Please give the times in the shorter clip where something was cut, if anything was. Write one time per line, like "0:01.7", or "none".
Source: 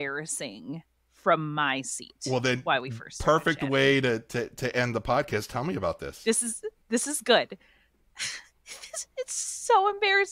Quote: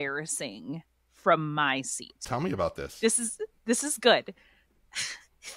0:02.2